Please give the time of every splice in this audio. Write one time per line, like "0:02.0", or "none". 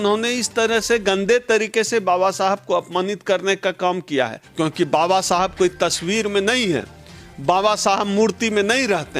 0:04.4